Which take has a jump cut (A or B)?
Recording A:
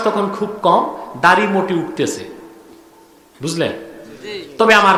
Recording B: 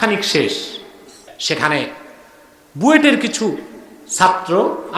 B